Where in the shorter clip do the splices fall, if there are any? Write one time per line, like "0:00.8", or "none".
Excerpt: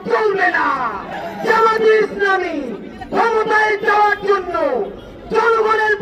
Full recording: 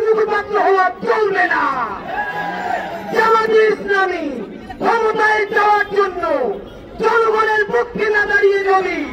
0:01.1